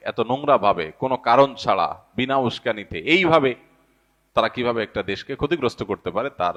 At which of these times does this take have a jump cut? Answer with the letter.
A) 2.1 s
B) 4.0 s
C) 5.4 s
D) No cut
D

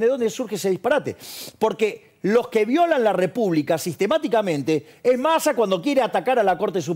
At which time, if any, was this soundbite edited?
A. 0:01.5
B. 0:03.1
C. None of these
C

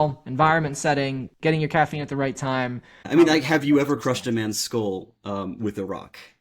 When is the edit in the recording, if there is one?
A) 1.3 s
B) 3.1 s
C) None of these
B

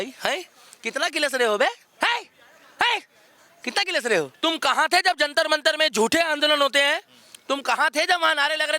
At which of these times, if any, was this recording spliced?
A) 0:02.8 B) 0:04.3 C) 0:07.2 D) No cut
B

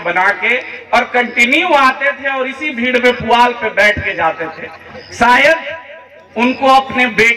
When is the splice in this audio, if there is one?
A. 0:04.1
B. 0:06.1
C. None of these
C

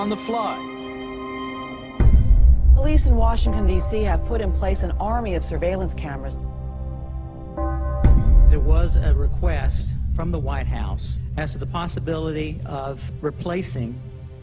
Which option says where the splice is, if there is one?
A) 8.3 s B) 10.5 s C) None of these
C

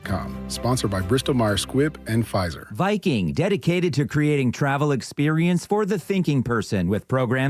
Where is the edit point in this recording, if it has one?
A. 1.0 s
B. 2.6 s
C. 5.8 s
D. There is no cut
B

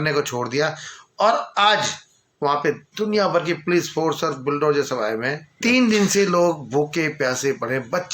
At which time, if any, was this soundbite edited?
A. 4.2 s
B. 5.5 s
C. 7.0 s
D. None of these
B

